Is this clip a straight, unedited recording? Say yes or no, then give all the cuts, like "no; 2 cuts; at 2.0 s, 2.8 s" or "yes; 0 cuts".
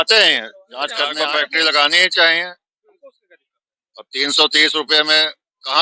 no; 1 cut; at 1.1 s